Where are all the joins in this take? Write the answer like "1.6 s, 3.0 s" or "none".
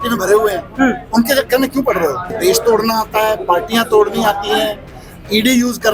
2.3 s